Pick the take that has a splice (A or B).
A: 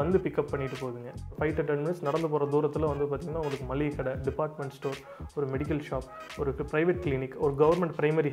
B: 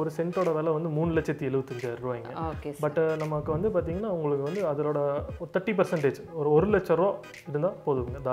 A